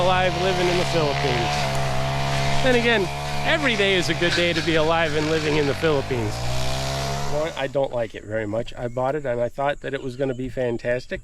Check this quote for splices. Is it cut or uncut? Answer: cut